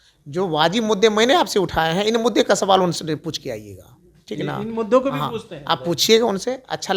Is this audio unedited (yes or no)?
yes